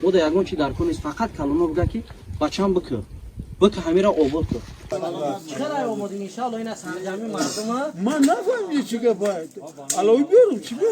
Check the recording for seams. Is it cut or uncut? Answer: cut